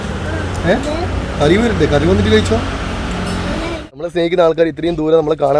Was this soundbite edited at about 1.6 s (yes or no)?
no